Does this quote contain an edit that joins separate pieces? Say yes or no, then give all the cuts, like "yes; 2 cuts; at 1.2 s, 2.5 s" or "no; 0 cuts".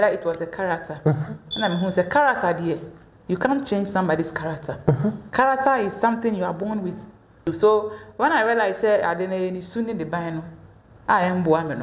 yes; 1 cut; at 7.4 s